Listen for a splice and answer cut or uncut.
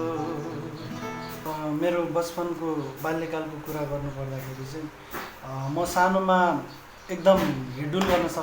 cut